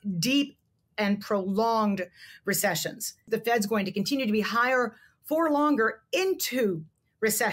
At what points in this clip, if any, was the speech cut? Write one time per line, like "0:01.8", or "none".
0:03.3